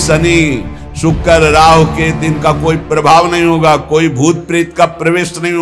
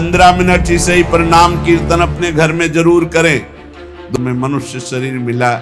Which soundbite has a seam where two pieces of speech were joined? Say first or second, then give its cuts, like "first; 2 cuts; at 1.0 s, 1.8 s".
second; 1 cut; at 4.1 s